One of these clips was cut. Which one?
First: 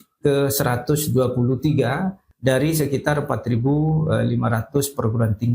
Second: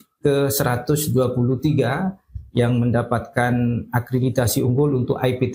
first; 1 cut; at 2.2 s

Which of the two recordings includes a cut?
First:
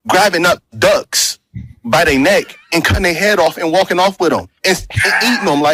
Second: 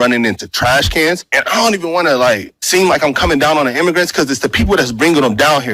second; 2 cuts; at 1.3 s, 2.5 s

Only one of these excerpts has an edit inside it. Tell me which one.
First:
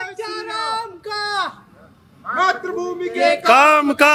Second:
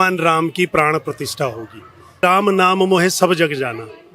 second; 1 cut; at 2.2 s

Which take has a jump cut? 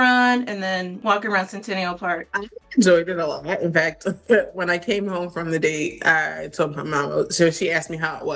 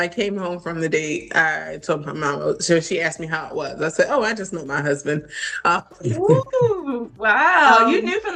first; 2 cuts; at 0.9 s, 2.3 s

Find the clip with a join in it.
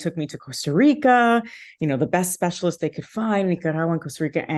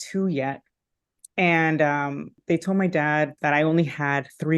second; 2 cuts; at 2.3 s, 3.3 s

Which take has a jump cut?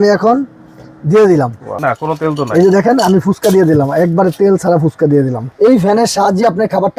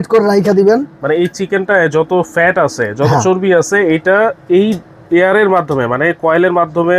first; 2 cuts; at 1.7 s, 5.4 s

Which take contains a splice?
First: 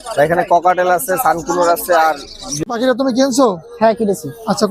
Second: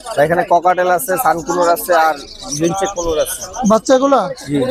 first; 1 cut; at 2.5 s

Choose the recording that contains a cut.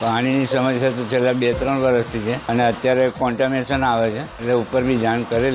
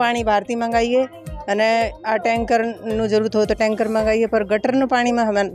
first; 2 cuts; at 2.4 s, 4.3 s

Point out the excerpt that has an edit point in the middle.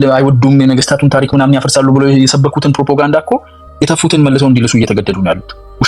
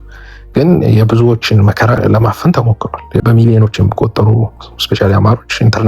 second; 2 cuts; at 2.0 s, 3.2 s

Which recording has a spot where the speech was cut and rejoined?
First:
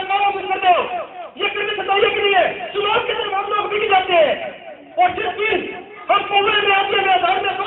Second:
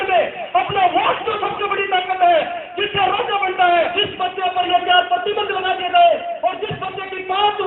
second; 1 cut; at 4.0 s

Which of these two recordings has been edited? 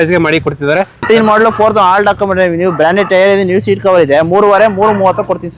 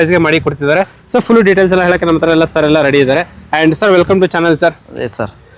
first; 1 cut; at 1.0 s

